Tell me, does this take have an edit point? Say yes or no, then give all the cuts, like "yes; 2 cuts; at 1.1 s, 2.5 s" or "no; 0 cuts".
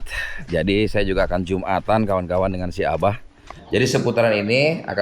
yes; 1 cut; at 3.5 s